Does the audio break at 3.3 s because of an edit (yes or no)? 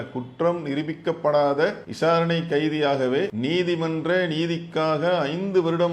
yes